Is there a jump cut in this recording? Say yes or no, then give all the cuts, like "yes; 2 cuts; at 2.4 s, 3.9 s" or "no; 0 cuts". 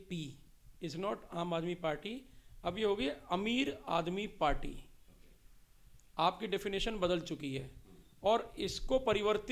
no; 0 cuts